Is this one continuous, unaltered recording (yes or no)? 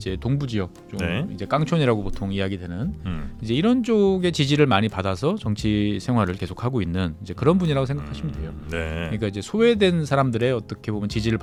yes